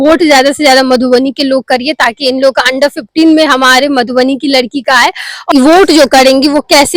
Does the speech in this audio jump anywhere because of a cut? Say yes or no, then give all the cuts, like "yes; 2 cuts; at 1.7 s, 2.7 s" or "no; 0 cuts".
yes; 1 cut; at 5.5 s